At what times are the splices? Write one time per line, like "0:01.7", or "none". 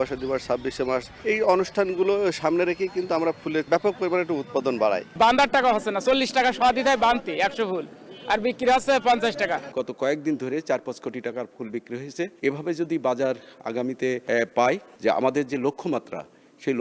0:01.1
0:03.7
0:05.1
0:09.7
0:12.3
0:14.6